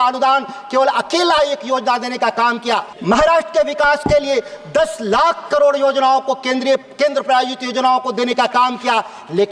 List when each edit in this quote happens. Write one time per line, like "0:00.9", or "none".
0:02.9